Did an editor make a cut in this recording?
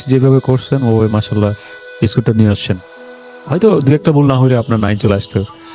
no; 0 cuts

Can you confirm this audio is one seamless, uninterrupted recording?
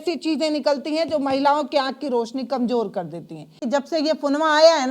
no; 1 cut; at 3.6 s

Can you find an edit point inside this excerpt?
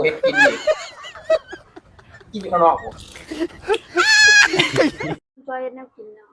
yes; 1 cut; at 5.2 s

